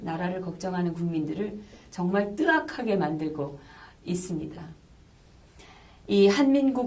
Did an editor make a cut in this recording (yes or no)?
no